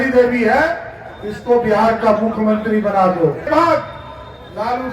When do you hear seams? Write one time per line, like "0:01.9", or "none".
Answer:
0:03.5